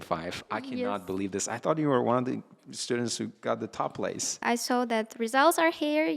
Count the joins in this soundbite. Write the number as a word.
one